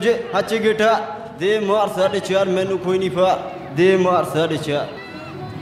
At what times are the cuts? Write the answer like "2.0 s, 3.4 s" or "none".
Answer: none